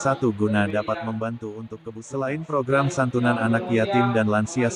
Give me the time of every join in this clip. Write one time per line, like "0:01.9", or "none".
0:01.9